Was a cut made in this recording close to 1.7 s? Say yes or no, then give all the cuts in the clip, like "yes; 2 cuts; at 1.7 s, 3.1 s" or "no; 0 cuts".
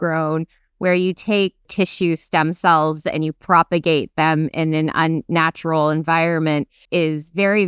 yes; 2 cuts; at 1.7 s, 6.8 s